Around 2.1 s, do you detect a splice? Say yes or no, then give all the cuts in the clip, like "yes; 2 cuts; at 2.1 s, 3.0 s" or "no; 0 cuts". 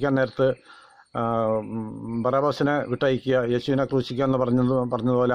no; 0 cuts